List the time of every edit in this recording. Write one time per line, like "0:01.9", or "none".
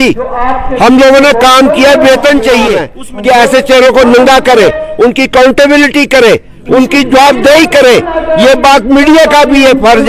none